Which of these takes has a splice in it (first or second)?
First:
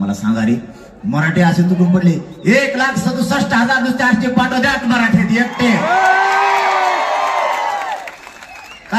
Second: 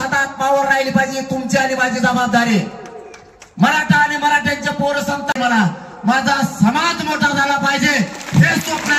second